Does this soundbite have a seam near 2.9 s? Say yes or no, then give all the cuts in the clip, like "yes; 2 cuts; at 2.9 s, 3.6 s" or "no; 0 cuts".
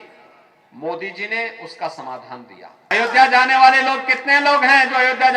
yes; 1 cut; at 2.9 s